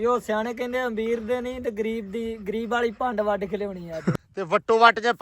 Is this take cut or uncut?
cut